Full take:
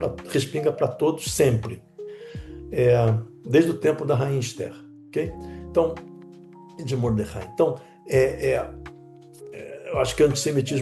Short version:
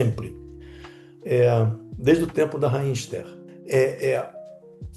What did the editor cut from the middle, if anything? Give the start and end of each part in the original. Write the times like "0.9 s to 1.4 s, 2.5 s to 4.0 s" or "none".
5.0 s to 7.9 s